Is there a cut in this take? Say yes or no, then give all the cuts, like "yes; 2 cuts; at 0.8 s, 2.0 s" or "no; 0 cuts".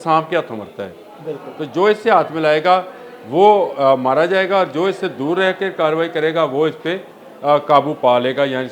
no; 0 cuts